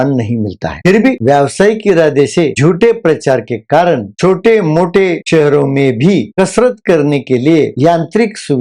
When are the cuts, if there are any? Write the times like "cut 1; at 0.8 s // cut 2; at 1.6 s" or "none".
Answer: cut 1; at 2.5 s // cut 2; at 4.1 s